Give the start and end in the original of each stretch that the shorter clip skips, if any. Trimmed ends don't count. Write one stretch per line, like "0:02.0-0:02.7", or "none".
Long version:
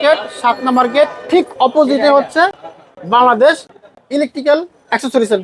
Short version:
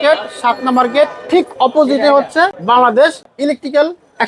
0:02.6-0:03.0
0:03.7-0:04.0